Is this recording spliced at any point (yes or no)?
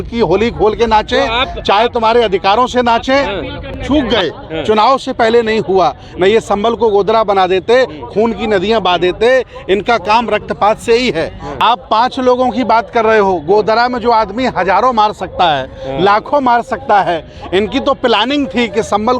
yes